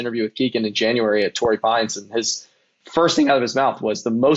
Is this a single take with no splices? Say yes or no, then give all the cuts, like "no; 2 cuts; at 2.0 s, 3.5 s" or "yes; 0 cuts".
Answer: yes; 0 cuts